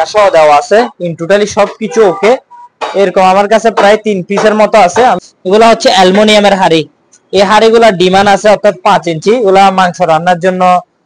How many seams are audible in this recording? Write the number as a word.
one